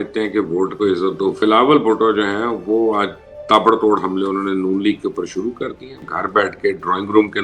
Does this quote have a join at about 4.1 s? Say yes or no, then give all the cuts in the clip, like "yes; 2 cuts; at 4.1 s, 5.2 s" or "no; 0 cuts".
no; 2 cuts; at 1.4 s, 6.0 s